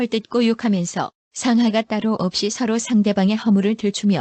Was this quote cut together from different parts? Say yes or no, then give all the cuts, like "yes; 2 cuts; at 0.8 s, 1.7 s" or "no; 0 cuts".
no; 0 cuts